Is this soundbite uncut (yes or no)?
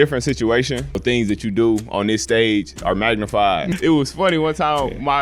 no